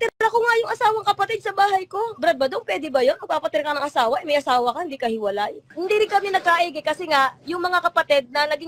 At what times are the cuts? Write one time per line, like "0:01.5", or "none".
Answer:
0:05.7